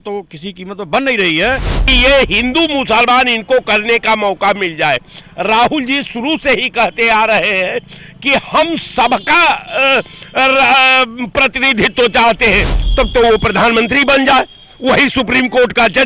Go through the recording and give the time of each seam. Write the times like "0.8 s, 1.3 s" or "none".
1.7 s, 12.8 s

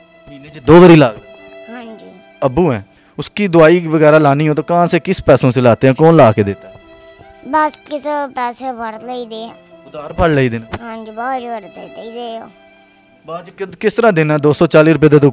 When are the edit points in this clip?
2.4 s

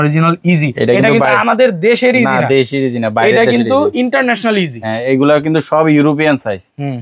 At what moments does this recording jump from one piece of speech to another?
none

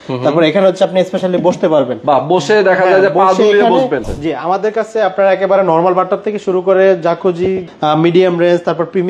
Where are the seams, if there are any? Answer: 4.1 s, 7.7 s

